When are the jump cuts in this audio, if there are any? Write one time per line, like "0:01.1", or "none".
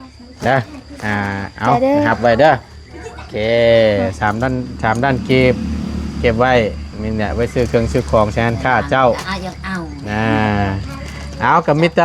none